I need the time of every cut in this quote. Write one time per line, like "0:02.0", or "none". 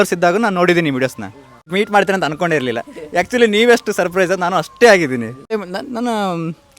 0:01.7
0:05.6